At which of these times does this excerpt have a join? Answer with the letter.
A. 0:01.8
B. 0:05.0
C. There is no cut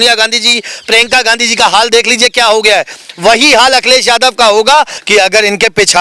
B